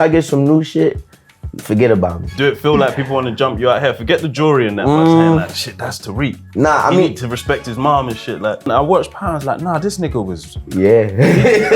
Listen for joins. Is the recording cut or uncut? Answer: cut